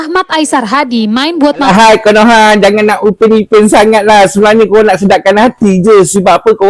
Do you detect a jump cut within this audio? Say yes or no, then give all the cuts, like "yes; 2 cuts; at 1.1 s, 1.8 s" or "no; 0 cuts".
yes; 1 cut; at 1.7 s